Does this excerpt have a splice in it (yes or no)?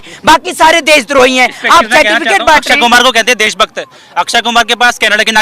no